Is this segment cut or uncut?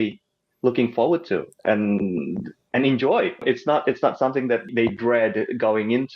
cut